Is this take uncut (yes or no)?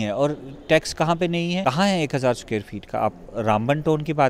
no